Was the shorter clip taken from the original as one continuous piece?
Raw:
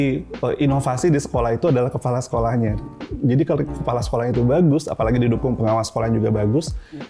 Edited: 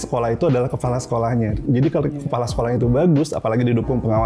no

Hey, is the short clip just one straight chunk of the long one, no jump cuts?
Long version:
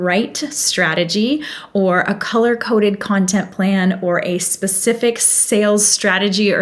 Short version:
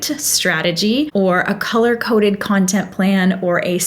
no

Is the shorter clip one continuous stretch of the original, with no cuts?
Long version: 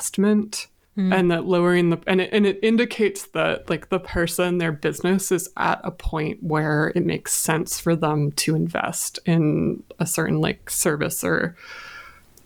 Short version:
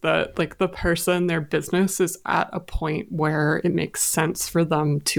yes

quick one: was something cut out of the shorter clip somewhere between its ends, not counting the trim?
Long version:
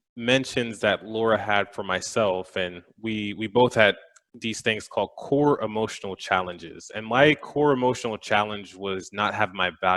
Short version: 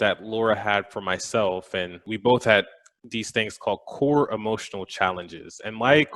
yes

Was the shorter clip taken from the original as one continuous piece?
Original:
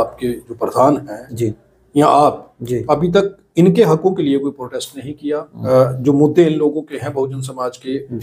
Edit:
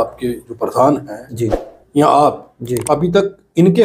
yes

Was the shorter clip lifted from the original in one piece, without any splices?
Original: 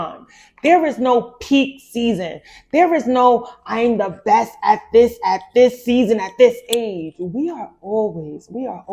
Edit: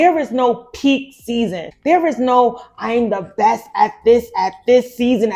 no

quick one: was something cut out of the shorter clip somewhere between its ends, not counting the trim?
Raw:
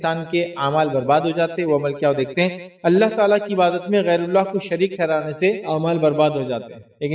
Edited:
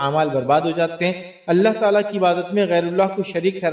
yes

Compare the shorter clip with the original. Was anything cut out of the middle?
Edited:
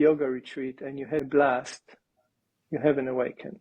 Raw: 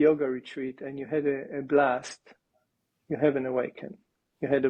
yes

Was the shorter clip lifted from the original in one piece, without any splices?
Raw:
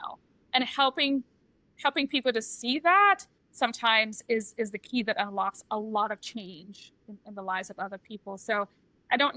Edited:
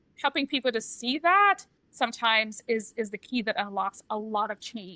yes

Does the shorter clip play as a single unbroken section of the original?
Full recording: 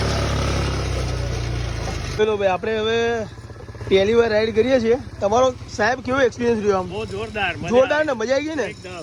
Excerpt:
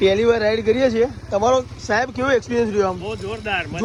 yes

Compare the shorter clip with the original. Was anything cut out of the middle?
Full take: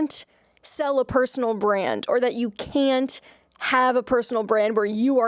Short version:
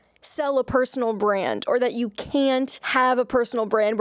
yes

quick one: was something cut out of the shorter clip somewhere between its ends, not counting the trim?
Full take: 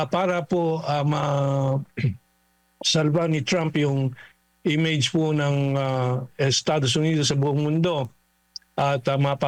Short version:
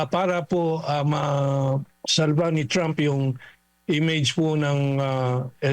yes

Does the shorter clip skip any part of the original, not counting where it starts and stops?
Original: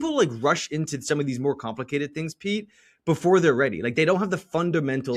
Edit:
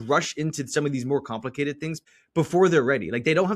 yes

